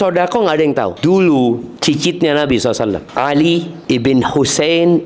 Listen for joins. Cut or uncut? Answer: cut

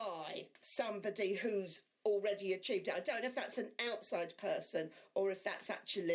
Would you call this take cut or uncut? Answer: uncut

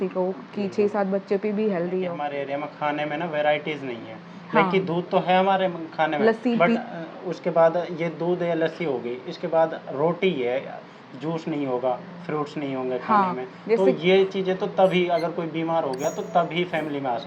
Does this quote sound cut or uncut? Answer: cut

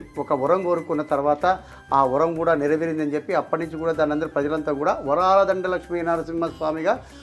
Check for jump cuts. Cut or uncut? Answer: uncut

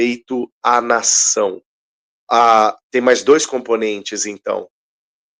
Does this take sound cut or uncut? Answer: uncut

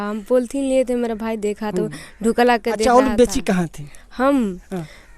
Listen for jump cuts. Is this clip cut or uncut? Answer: cut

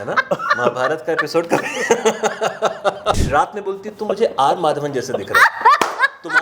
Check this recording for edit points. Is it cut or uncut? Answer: cut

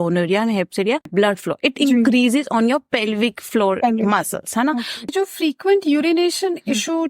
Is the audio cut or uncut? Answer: cut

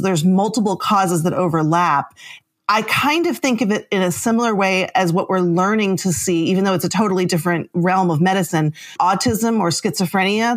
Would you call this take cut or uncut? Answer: cut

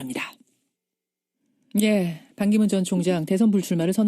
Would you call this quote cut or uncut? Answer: cut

